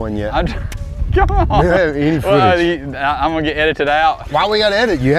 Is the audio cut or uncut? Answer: cut